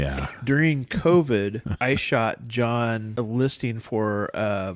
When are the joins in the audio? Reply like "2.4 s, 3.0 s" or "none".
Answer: 1.7 s, 3.1 s